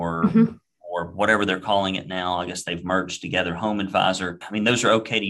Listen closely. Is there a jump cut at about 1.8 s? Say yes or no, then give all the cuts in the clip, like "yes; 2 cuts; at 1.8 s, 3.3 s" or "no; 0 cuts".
no; 1 cut; at 4.4 s